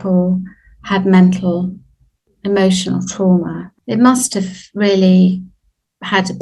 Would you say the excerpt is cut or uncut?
cut